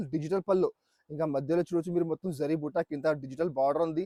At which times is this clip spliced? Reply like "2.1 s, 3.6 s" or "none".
none